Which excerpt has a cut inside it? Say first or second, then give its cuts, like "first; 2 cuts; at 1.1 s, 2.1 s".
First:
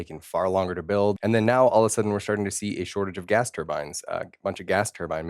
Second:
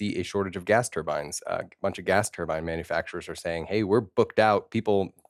first; 1 cut; at 1.2 s